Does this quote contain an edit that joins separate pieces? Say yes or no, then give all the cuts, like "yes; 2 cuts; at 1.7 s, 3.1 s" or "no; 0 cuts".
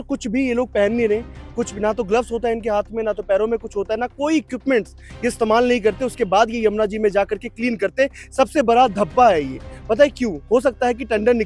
no; 0 cuts